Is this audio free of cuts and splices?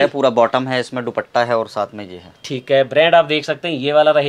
yes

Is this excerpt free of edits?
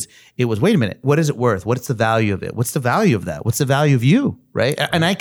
no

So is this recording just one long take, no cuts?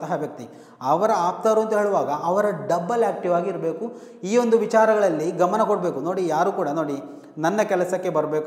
yes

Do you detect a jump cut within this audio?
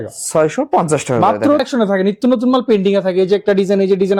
yes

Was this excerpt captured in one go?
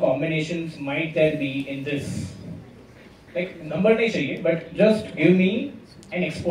yes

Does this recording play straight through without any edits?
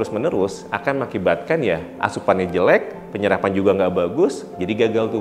yes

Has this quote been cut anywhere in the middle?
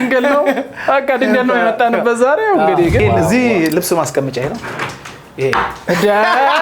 yes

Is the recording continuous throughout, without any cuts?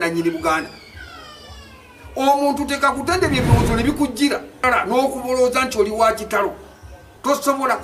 no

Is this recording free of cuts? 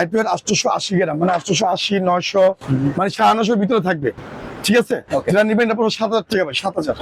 yes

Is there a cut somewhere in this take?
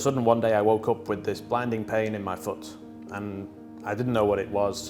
no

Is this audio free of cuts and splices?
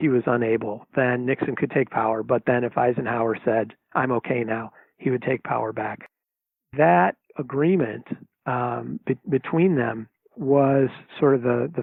yes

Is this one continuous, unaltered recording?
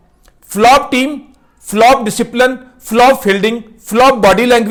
yes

